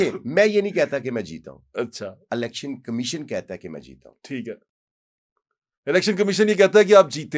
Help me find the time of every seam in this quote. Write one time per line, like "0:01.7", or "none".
none